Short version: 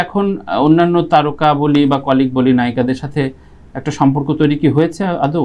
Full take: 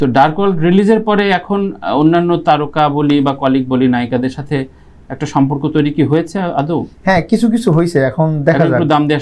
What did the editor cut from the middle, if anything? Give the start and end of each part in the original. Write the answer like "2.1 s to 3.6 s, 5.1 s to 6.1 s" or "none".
none